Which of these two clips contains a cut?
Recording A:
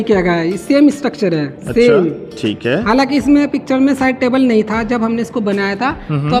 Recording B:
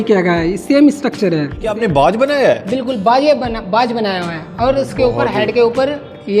B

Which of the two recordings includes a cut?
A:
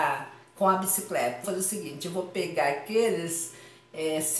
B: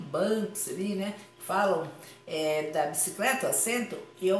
A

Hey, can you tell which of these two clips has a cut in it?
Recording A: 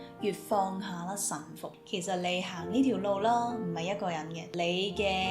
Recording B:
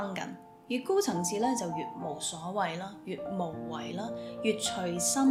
A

